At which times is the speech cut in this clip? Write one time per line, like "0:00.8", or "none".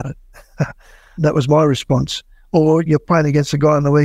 none